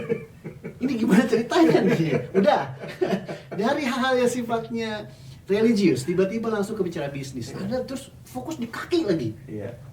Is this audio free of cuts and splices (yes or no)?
yes